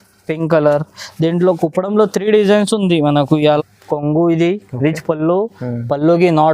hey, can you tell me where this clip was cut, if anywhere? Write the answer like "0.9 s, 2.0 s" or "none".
3.6 s